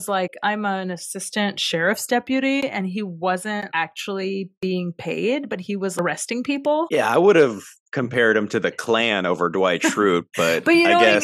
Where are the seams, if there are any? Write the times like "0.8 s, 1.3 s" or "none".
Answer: 3.7 s, 5.9 s